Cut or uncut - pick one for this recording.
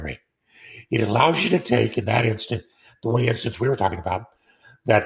uncut